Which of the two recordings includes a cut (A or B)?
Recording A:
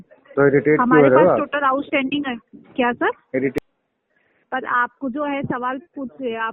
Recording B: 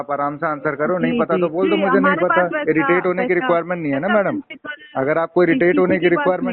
A